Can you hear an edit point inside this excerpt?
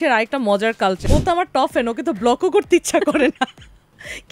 yes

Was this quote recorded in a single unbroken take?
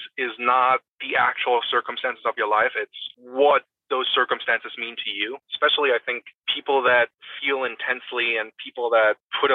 no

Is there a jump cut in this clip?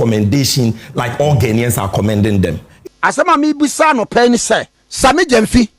yes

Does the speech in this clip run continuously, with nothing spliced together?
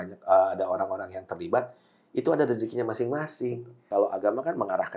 no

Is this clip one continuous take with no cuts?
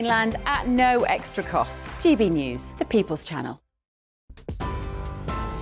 no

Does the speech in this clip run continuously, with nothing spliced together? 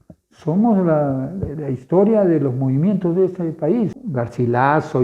no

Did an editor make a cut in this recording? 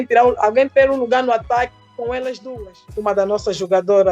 yes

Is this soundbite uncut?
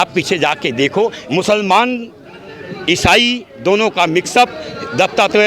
no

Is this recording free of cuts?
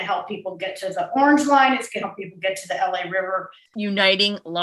no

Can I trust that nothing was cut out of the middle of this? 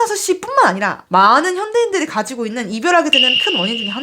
no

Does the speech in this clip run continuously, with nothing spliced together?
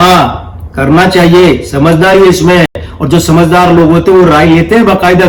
yes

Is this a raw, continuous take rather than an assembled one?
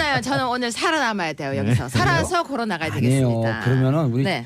no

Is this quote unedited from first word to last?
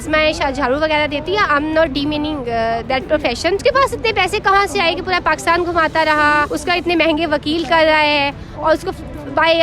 no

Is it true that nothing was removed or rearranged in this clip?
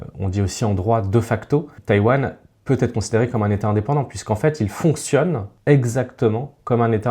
no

